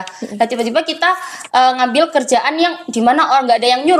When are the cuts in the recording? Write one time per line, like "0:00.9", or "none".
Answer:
none